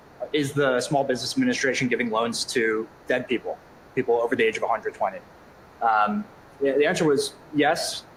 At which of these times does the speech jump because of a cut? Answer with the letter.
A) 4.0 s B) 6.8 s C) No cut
C